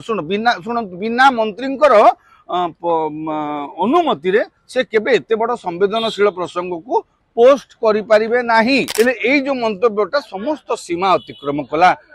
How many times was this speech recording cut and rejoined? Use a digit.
1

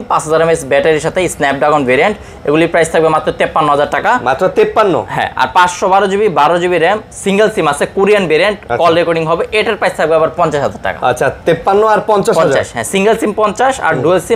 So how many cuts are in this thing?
0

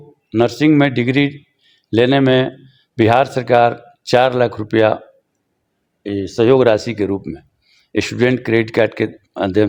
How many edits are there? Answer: 0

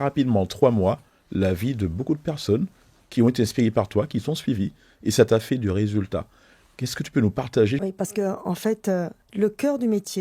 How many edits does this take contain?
2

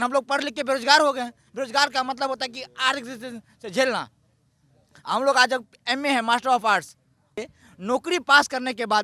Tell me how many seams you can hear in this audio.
1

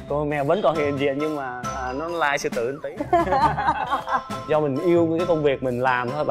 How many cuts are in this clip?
1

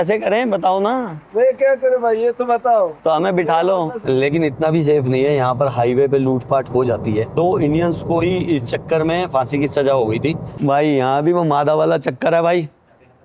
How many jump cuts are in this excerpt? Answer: 3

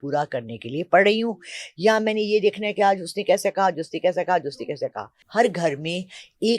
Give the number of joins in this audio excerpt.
1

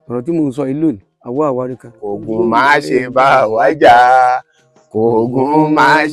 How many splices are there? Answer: 1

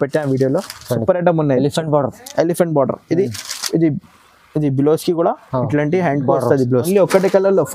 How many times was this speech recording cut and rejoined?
1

